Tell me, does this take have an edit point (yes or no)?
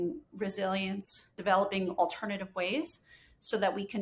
yes